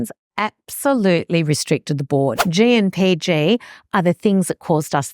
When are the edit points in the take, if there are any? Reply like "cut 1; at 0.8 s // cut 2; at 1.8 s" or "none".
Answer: cut 1; at 2.4 s